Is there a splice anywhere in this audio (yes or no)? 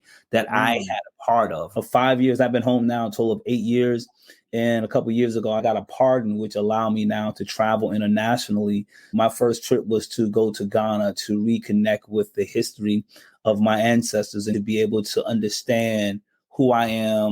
yes